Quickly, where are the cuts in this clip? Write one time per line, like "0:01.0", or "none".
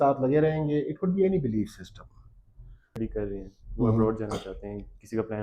0:03.0